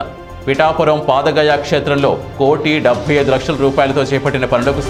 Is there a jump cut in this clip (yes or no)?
no